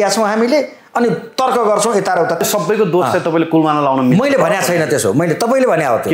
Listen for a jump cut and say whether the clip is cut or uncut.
cut